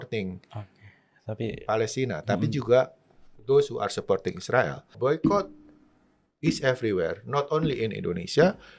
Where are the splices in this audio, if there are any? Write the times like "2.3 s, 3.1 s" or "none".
5.0 s